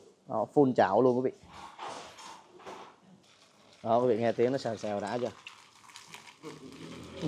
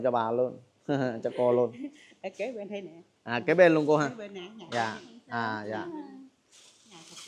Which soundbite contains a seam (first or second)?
first